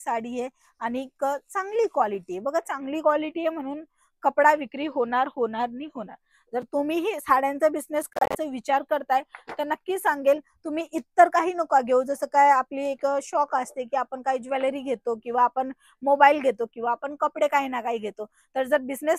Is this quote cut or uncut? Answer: uncut